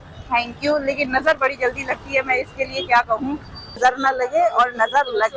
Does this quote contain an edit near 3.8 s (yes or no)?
yes